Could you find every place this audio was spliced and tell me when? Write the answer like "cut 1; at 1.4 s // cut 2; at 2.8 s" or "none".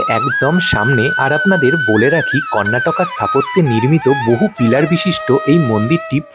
none